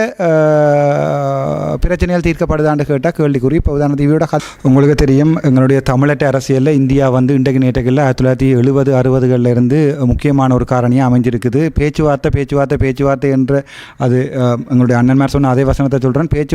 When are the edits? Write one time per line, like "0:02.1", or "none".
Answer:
0:04.4